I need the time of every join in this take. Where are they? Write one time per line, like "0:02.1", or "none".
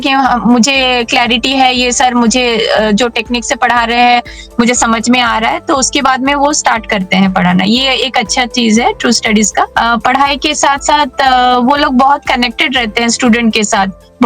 0:09.7